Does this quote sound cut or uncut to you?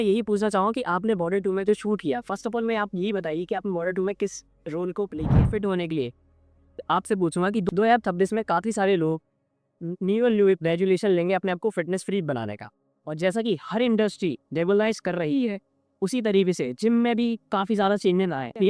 cut